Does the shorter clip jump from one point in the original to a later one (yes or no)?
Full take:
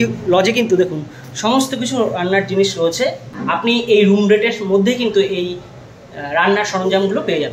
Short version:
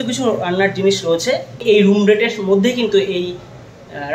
yes